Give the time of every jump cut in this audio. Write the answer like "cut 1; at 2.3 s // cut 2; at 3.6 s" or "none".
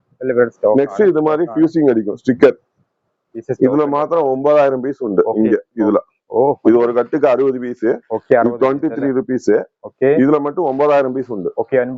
cut 1; at 3.4 s